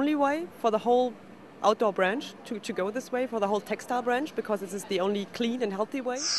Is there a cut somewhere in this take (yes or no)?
no